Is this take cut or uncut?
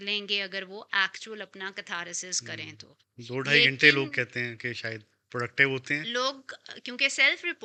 uncut